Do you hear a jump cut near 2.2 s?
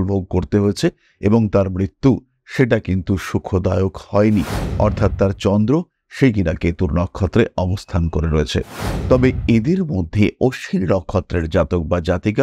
no; 1 cut; at 8.9 s

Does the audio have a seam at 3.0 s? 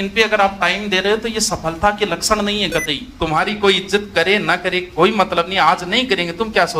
yes; 1 cut; at 3.0 s

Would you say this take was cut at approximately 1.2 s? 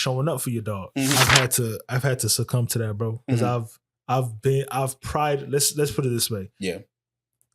yes; 1 cut; at 1.2 s

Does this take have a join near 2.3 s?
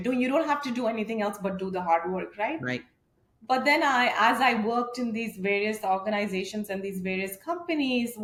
no; 0 cuts

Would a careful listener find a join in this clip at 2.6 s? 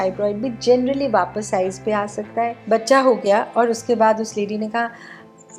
yes; 1 cut; at 2.6 s

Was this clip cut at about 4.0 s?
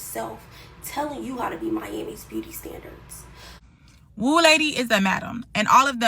yes; 1 cut; at 4.0 s

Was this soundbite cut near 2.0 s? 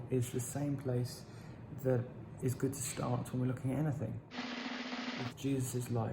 no; 2 cuts; at 4.2 s, 5.4 s

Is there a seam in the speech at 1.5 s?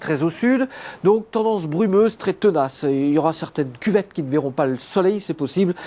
yes; 1 cut; at 1.5 s

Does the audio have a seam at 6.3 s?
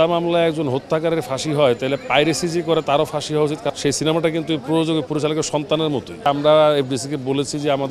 yes; 2 cuts; at 3.7 s, 6.3 s

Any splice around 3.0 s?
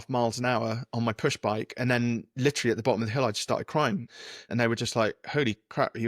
no; 1 cut; at 4.5 s

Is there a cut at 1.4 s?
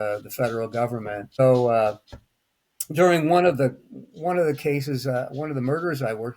yes; 1 cut; at 1.4 s

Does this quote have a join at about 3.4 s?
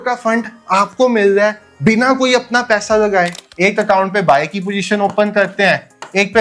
yes; 1 cut; at 3.4 s

